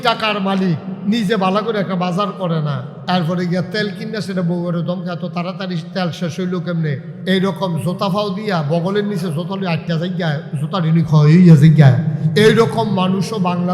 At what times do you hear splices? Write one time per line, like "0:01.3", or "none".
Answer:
0:00.9
0:02.9
0:07.1
0:12.2